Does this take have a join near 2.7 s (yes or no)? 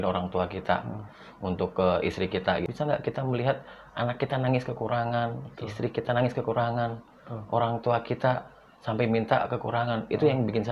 yes